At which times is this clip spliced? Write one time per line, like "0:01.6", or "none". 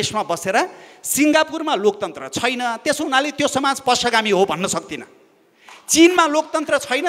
none